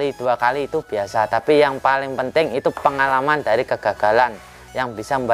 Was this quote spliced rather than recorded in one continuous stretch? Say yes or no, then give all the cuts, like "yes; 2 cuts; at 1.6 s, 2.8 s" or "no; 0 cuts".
no; 0 cuts